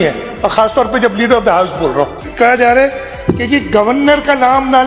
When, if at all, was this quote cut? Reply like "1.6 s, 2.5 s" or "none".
2.2 s